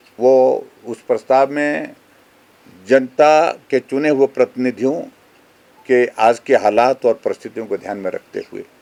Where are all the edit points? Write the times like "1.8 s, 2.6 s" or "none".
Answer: none